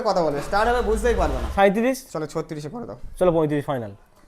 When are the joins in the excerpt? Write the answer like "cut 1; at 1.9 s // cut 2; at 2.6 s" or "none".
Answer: cut 1; at 1.4 s

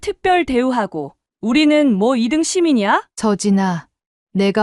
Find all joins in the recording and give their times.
cut 1; at 3.1 s

